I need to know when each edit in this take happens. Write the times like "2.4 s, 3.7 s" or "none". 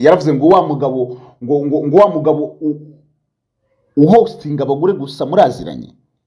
none